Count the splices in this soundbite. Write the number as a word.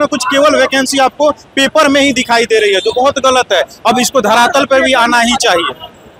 zero